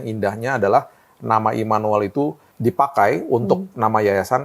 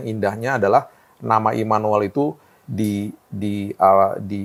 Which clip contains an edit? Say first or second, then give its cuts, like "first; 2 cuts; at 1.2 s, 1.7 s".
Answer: first; 1 cut; at 2.5 s